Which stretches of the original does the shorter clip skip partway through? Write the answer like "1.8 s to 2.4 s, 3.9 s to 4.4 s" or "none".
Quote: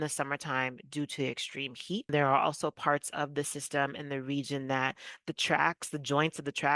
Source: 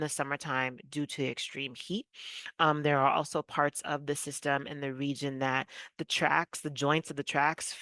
2.1 s to 2.8 s